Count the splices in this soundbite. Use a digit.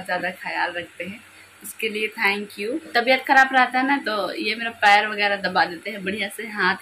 1